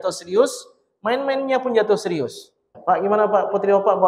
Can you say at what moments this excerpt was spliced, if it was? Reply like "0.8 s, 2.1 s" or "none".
2.6 s